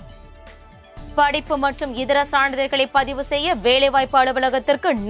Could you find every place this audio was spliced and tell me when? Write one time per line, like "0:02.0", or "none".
0:00.9